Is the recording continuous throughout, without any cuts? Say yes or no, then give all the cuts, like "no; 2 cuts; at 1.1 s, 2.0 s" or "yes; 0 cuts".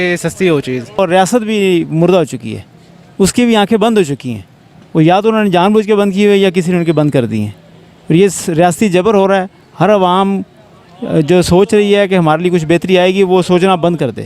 no; 1 cut; at 1.0 s